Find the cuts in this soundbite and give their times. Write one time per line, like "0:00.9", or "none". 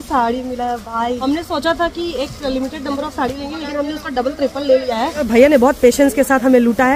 0:01.2
0:05.3